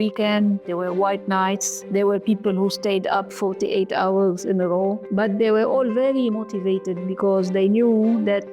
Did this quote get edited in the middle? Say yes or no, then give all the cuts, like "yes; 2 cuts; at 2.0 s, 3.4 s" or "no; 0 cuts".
yes; 3 cuts; at 1.7 s, 3.3 s, 5.0 s